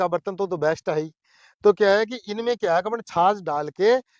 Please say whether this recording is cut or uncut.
uncut